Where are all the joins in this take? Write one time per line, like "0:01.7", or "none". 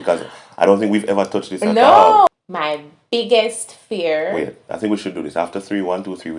0:02.3